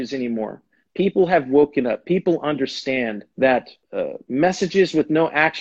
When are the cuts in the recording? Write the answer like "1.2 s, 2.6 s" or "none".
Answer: 3.2 s, 3.8 s